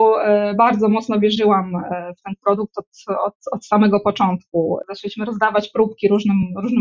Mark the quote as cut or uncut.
cut